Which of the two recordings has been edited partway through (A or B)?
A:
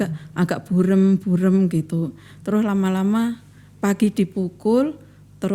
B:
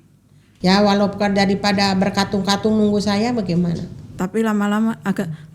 B